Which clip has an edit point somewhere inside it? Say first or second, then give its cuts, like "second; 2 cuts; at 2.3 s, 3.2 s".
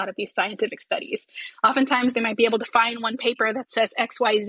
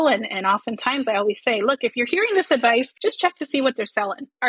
second; 1 cut; at 2.9 s